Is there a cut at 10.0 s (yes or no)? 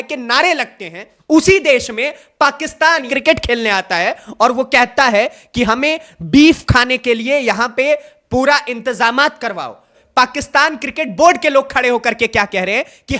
yes